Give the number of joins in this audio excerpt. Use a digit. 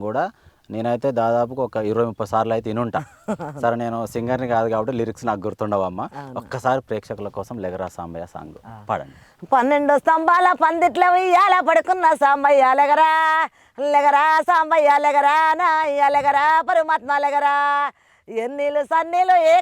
0